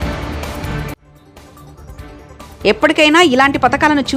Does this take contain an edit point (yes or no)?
no